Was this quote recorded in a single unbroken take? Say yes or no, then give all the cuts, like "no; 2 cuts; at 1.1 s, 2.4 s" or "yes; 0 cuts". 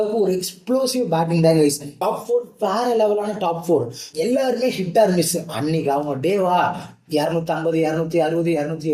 no; 1 cut; at 4.0 s